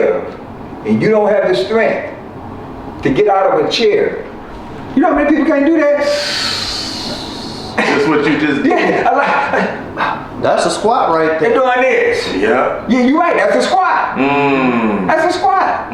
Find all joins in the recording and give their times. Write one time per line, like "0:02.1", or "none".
none